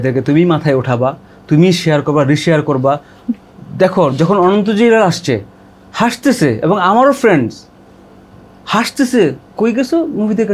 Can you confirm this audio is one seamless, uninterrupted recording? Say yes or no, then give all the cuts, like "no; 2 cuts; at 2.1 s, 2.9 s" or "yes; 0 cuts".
yes; 0 cuts